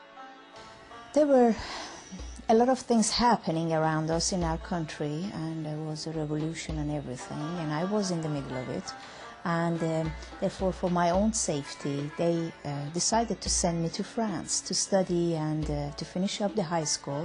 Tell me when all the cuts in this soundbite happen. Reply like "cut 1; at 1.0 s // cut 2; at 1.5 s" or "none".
cut 1; at 7.0 s

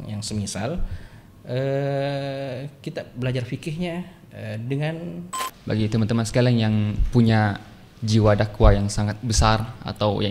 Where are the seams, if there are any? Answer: cut 1; at 5.3 s

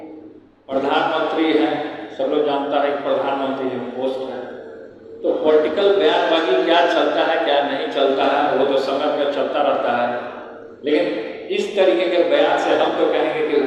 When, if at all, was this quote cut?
none

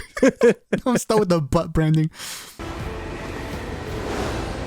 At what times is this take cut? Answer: cut 1; at 2.6 s

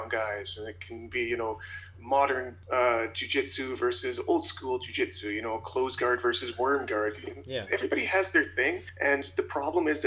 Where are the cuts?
cut 1; at 2.6 s // cut 2; at 8.9 s

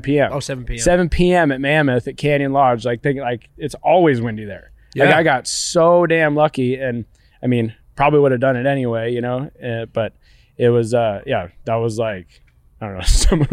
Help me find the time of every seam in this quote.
none

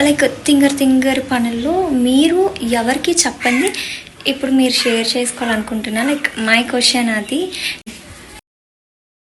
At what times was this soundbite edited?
cut 1; at 7.8 s

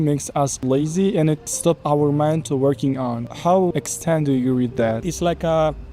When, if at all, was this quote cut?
cut 1; at 3.7 s // cut 2; at 5.1 s

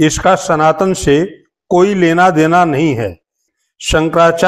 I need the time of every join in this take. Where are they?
cut 1; at 3.3 s

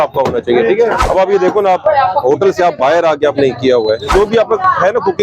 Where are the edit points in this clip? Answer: cut 1; at 1.0 s // cut 2; at 4.1 s

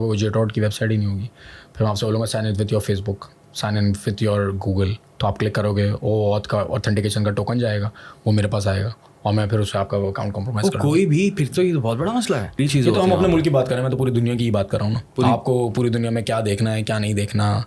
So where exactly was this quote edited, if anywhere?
cut 1; at 12.7 s

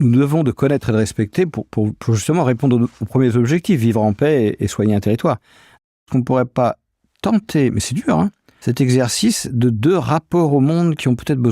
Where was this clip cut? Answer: cut 1; at 6.0 s // cut 2; at 8.5 s

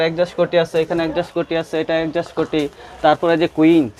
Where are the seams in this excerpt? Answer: none

